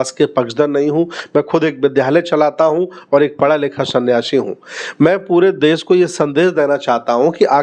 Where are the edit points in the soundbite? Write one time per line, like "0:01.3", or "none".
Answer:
none